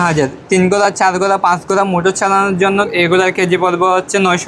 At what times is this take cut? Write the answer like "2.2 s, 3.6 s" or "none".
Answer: 2.9 s

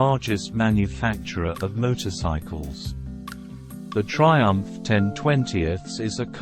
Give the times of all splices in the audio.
2.4 s, 3.9 s

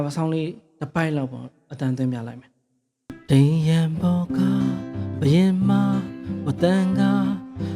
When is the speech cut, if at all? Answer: 3.2 s

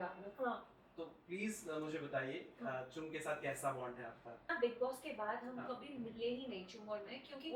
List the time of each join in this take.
4.5 s

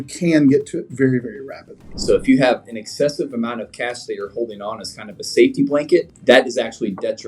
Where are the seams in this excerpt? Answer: 1.9 s, 6.1 s

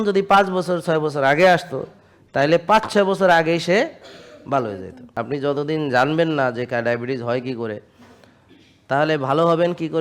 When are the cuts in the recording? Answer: 5.0 s

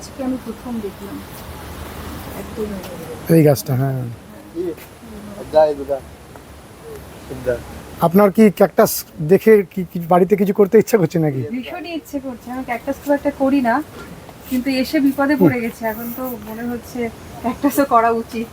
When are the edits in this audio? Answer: none

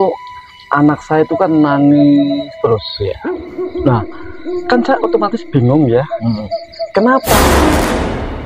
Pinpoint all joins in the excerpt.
7.3 s

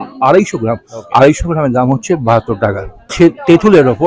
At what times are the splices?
none

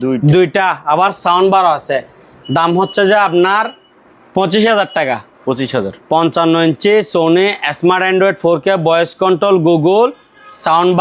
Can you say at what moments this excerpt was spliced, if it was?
none

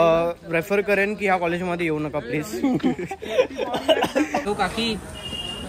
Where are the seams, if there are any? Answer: 4.4 s

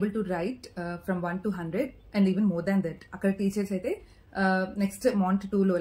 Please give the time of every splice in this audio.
none

